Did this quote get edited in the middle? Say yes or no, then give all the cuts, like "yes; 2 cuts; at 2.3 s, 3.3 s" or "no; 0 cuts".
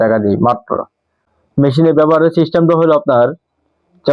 yes; 1 cut; at 1.2 s